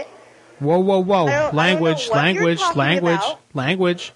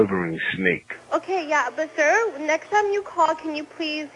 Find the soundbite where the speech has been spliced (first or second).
second